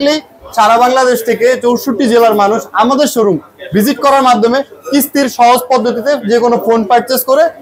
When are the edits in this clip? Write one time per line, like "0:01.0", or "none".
none